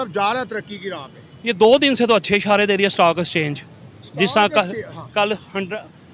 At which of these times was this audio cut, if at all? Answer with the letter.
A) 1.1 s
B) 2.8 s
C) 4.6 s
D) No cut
D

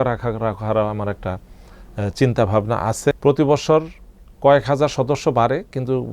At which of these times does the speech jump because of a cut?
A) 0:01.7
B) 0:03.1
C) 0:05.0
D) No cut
B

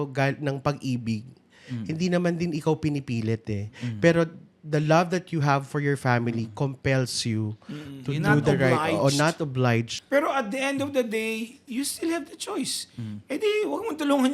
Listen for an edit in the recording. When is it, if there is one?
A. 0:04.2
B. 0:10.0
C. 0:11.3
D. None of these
B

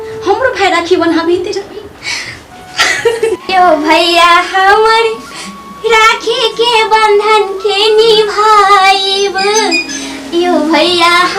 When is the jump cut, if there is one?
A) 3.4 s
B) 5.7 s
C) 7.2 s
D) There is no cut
A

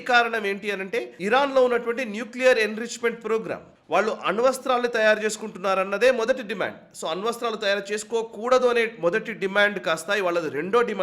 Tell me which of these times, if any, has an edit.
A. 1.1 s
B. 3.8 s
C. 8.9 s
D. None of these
A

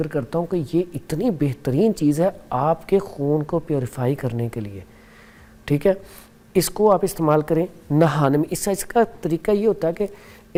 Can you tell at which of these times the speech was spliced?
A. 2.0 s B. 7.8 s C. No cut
C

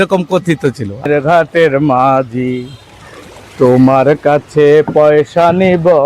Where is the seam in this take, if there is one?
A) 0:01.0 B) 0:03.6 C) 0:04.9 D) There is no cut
A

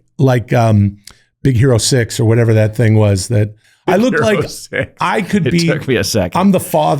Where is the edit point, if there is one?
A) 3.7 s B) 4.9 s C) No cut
A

